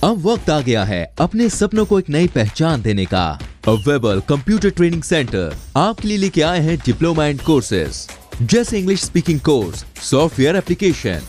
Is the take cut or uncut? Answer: uncut